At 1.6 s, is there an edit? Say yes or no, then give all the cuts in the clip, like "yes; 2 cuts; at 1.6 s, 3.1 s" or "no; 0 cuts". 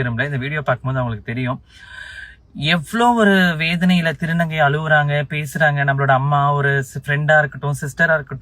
no; 0 cuts